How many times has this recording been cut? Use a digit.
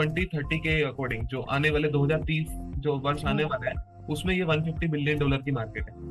0